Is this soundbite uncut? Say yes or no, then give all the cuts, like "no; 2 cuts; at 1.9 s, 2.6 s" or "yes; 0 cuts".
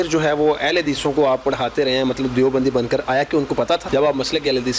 no; 1 cut; at 3.8 s